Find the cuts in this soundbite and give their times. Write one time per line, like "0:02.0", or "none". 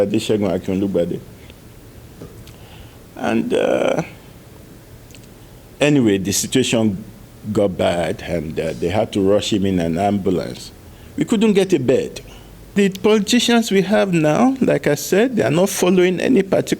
0:12.7